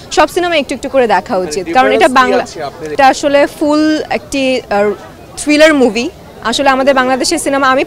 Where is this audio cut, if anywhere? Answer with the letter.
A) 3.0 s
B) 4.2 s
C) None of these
A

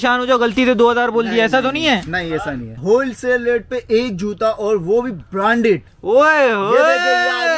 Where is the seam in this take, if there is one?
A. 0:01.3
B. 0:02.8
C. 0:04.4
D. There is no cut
B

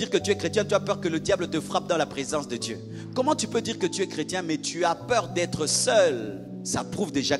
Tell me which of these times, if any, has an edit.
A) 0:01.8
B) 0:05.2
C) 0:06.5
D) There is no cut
C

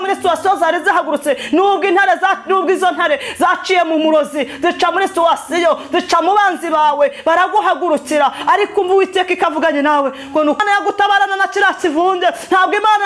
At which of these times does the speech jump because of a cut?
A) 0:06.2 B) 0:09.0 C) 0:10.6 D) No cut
C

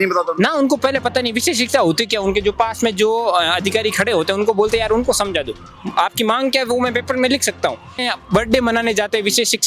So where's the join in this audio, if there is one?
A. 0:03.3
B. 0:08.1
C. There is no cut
B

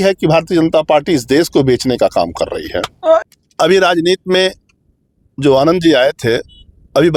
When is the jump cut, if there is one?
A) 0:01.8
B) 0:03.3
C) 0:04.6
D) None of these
B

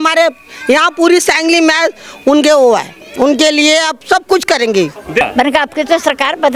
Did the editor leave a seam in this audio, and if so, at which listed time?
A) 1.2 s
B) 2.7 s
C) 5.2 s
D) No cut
C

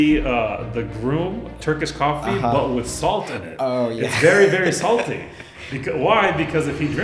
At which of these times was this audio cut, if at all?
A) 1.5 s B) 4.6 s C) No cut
A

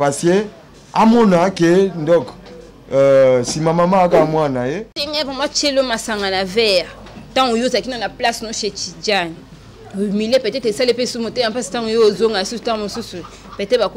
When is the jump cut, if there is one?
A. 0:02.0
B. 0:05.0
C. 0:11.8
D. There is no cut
B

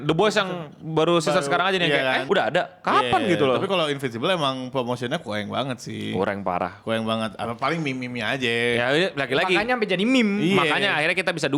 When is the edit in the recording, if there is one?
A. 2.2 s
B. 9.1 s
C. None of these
A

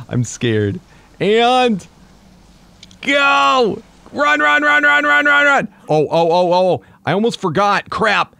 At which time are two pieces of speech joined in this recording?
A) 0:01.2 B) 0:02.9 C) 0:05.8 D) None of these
C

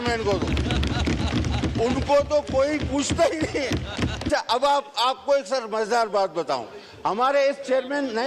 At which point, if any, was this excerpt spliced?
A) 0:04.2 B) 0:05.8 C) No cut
A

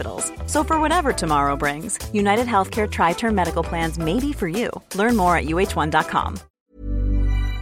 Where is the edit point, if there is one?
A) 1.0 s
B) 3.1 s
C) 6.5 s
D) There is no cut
C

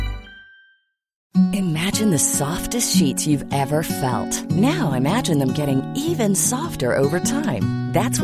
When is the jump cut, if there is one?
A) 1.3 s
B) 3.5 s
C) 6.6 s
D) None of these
A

